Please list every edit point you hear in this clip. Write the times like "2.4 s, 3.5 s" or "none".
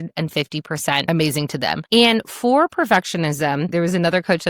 1.8 s